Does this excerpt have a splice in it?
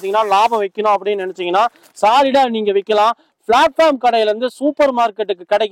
no; 0 cuts

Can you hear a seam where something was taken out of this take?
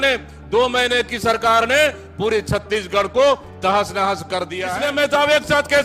yes; 1 cut; at 4.6 s

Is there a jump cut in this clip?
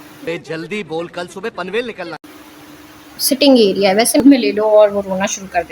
yes; 1 cut; at 4.2 s

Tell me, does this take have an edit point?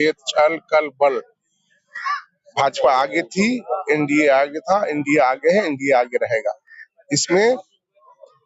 no; 0 cuts

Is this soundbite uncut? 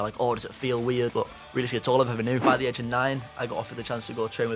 no; 2 cuts; at 1.1 s, 2.4 s

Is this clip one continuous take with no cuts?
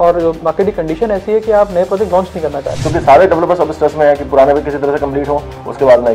no; 1 cut; at 2.7 s

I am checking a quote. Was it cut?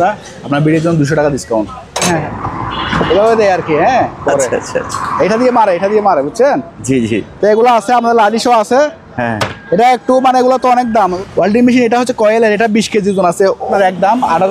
yes; 3 cuts; at 2.0 s, 11.1 s, 13.7 s

